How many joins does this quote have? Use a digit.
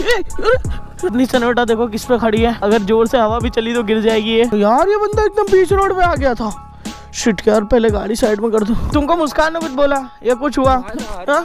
4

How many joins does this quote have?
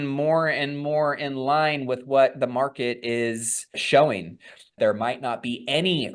2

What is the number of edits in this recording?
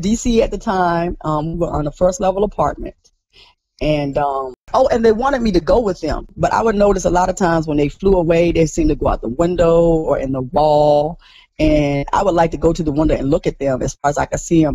2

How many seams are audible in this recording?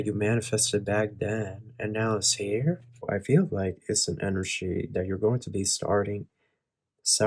1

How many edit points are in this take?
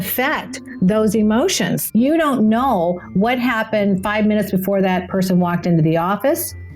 1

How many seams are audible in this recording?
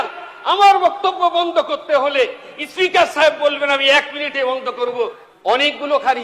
1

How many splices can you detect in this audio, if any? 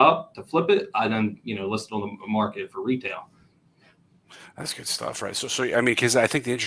0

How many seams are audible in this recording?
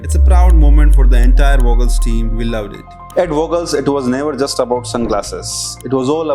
1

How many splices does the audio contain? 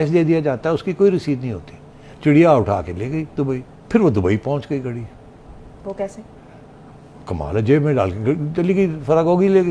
2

